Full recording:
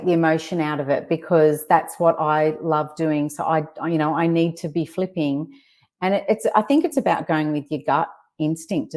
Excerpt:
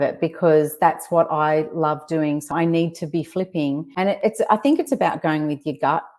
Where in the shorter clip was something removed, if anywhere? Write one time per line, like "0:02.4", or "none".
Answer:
0:02.5
0:03.9